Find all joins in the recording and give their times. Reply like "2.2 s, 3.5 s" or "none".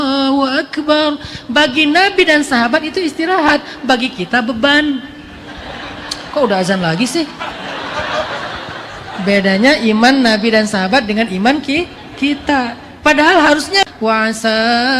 13.8 s